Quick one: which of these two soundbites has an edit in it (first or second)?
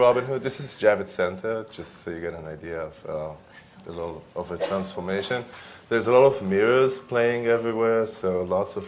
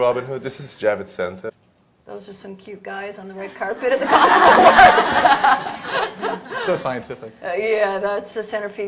first